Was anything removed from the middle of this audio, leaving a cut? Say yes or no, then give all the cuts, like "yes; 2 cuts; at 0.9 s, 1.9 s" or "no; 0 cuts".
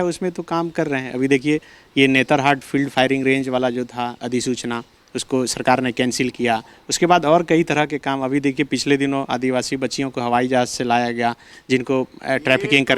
no; 0 cuts